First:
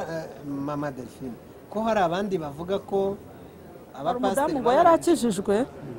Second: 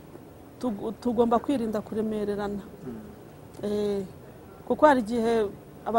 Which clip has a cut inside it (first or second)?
first